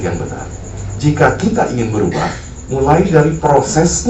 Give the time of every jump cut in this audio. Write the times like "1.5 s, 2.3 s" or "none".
none